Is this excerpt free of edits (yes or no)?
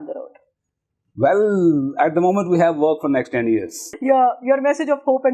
no